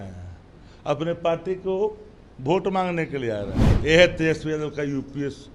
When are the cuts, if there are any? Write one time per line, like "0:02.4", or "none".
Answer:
0:03.6